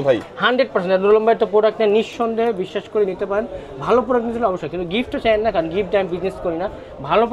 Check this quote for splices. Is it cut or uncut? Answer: uncut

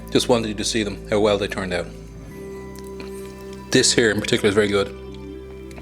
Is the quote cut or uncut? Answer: uncut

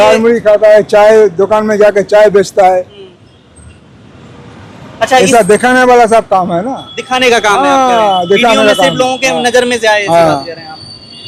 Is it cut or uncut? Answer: uncut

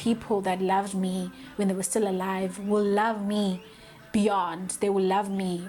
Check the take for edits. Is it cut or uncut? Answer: uncut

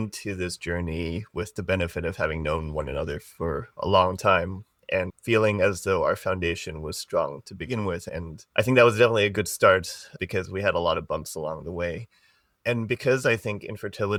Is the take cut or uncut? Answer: uncut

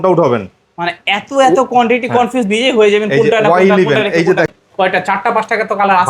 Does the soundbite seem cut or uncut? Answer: cut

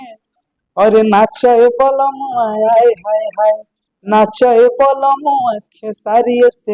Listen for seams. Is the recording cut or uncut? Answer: uncut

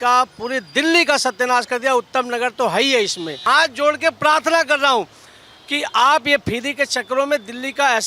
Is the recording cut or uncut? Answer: cut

